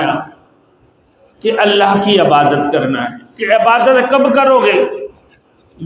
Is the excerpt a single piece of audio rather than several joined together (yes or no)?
yes